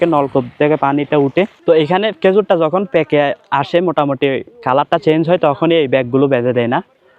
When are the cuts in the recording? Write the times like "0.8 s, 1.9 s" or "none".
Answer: 1.6 s